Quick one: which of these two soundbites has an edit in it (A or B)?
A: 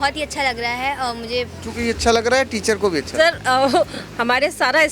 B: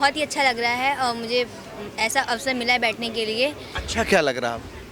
A